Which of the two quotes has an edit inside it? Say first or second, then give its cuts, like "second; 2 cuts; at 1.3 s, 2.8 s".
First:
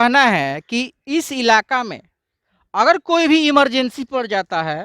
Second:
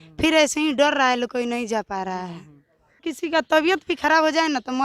second; 1 cut; at 3.1 s